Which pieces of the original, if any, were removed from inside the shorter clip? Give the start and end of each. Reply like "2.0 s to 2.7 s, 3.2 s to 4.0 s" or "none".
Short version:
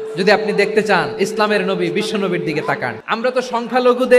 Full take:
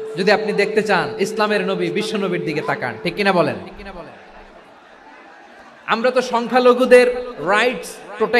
3.0 s to 5.8 s